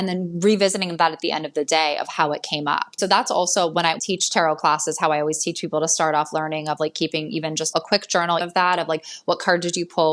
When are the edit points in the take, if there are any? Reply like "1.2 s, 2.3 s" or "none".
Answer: 2.9 s, 4.0 s, 8.4 s